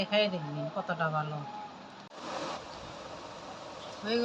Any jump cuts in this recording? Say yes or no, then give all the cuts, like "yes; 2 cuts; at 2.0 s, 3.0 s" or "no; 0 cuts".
yes; 1 cut; at 2.2 s